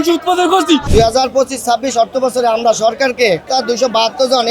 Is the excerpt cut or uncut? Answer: cut